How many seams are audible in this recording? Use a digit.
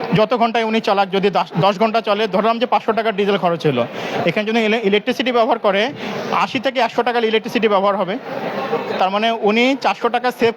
0